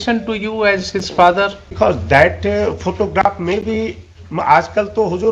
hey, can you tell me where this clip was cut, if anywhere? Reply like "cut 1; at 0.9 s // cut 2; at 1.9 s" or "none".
cut 1; at 1.8 s